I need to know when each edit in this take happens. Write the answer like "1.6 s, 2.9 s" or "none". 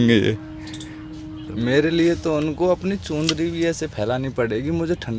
1.4 s